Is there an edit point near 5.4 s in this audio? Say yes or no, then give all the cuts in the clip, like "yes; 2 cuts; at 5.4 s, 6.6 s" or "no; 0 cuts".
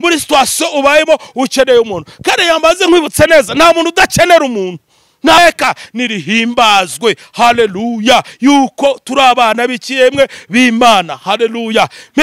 yes; 1 cut; at 5.4 s